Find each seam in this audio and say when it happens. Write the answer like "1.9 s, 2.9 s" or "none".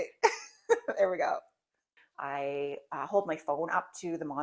1.9 s